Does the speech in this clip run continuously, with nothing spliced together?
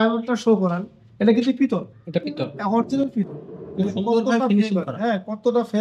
yes; 0 cuts

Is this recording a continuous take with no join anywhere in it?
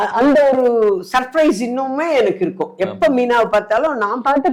yes; 0 cuts

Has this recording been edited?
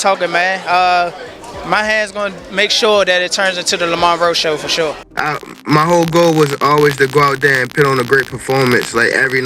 yes; 1 cut; at 5.0 s

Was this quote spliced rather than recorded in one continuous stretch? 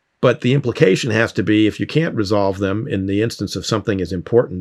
no; 0 cuts

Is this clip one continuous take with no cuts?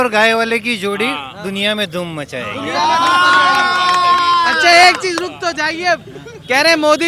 yes; 0 cuts

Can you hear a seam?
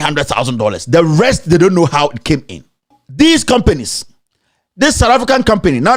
yes; 1 cut; at 3.0 s

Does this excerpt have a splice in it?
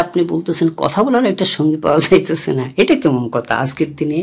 no; 0 cuts

